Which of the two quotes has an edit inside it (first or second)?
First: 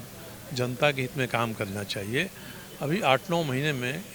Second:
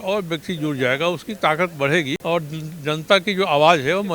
second